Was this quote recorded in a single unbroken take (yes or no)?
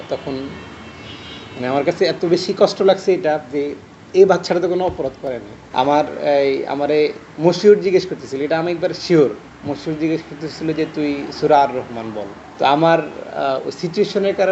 no